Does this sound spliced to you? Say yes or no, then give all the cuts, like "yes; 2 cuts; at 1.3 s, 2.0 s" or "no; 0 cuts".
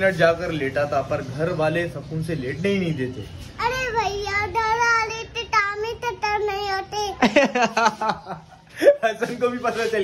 no; 0 cuts